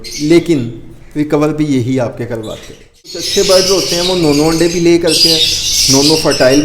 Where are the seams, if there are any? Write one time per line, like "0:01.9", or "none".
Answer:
0:03.2